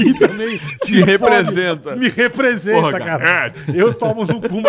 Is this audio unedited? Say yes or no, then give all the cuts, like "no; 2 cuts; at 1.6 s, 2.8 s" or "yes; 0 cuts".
no; 1 cut; at 3.5 s